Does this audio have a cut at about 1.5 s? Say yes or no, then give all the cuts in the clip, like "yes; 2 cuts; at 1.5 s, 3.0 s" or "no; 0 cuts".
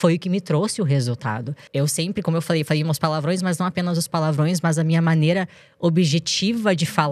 yes; 1 cut; at 1.5 s